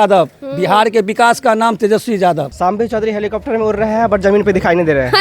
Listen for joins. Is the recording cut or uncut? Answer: cut